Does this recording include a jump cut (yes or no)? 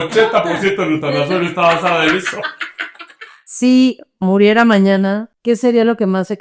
yes